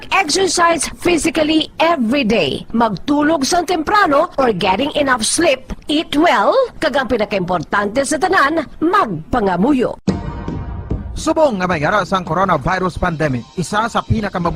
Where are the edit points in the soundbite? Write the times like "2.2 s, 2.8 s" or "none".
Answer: 10.1 s